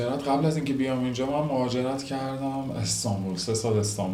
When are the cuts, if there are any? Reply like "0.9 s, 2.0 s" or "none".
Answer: none